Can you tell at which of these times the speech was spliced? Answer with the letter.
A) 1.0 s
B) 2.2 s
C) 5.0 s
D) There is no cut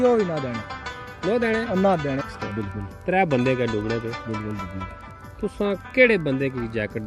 B